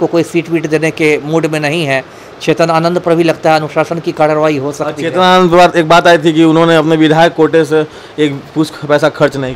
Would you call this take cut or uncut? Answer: uncut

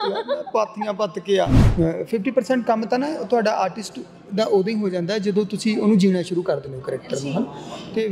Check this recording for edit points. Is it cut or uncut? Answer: cut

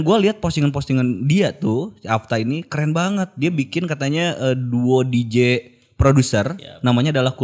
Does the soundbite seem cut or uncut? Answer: uncut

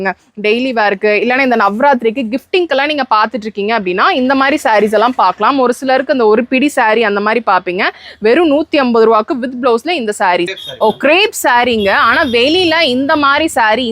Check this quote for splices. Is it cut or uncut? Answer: cut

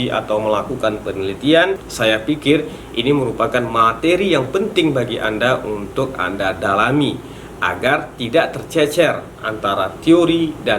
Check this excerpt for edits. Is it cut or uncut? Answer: cut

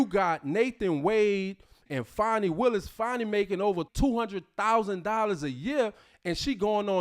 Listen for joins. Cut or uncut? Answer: cut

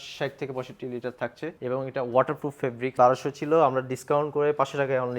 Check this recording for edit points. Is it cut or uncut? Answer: cut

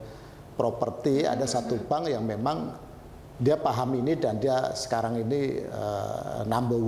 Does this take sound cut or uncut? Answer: uncut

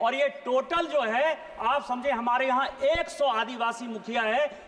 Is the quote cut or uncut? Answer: uncut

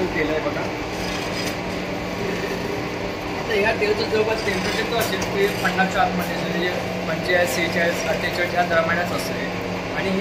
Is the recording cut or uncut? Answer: uncut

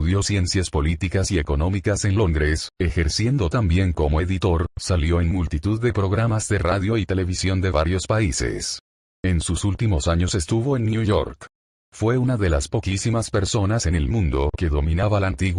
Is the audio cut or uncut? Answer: uncut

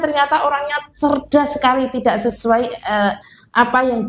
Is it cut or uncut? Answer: uncut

